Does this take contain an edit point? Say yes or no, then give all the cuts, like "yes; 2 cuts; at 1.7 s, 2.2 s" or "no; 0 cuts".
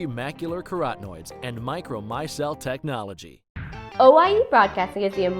yes; 1 cut; at 3.6 s